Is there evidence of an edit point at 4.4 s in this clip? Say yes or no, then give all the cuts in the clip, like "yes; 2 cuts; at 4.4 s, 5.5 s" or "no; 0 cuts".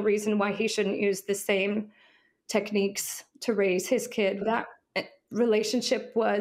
yes; 1 cut; at 4.4 s